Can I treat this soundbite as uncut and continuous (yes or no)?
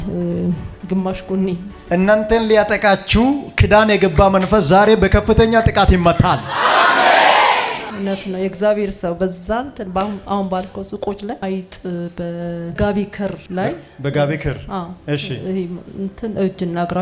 no